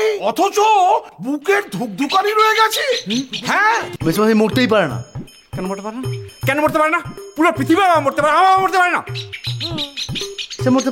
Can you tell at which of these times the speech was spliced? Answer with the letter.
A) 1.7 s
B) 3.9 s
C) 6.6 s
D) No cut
B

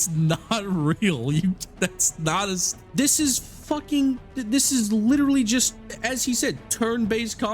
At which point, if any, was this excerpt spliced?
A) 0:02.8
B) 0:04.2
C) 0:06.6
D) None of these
A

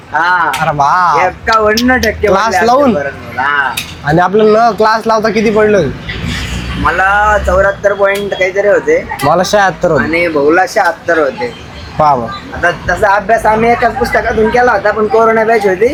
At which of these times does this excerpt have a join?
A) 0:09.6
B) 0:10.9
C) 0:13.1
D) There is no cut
D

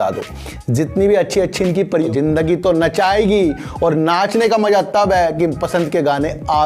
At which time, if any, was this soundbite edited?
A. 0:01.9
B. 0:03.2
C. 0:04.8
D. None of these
A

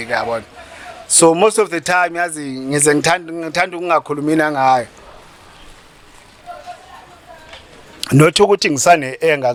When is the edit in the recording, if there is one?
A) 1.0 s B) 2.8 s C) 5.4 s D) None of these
D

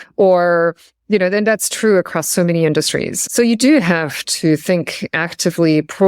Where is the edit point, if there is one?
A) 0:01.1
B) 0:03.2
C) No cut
B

